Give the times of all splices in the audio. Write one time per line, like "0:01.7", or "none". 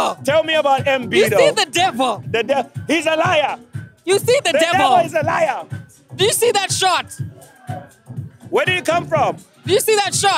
none